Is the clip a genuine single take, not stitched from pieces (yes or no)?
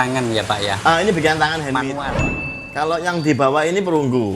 no